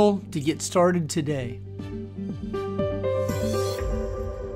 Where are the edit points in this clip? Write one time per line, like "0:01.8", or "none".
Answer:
0:01.6